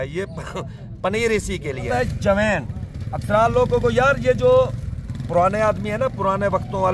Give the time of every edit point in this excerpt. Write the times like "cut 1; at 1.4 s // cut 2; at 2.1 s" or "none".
cut 1; at 1.9 s